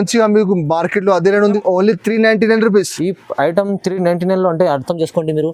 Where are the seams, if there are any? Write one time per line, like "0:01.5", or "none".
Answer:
0:01.5